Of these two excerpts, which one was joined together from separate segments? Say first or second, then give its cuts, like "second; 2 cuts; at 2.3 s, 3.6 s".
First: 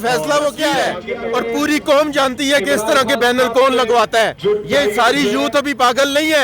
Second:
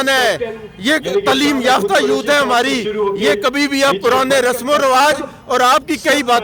first; 1 cut; at 1.0 s